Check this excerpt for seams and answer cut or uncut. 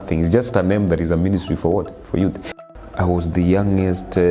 cut